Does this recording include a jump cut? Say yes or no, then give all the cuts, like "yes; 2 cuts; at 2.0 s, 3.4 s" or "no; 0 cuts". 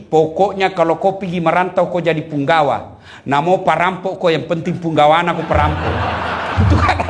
no; 0 cuts